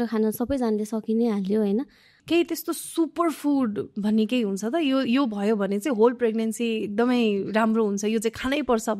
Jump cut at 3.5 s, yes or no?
no